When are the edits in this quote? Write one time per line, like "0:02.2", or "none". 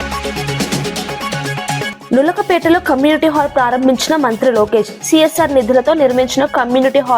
0:02.0